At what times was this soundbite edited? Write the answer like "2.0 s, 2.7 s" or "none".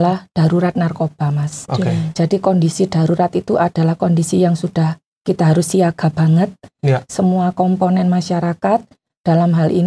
none